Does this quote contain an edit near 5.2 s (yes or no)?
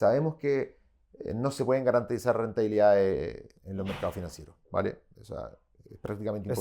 no